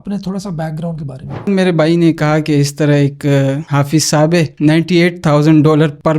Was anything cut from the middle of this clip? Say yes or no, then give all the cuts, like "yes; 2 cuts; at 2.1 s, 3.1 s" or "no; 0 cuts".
yes; 2 cuts; at 1.5 s, 4.5 s